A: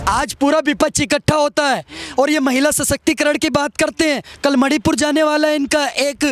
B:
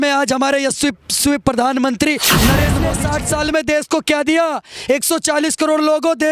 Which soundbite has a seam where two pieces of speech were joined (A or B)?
B